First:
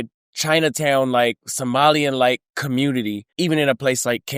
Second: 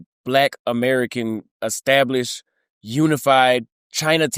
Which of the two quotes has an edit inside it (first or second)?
first